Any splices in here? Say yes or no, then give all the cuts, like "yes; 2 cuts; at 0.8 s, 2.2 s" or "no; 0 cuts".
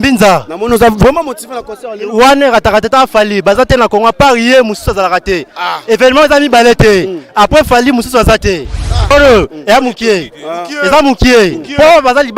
yes; 1 cut; at 9.1 s